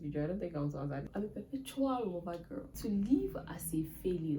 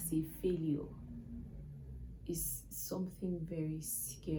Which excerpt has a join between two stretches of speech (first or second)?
first